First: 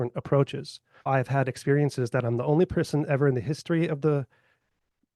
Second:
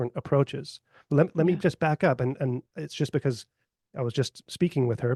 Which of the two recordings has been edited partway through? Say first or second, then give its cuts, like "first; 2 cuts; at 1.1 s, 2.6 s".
first; 1 cut; at 1.1 s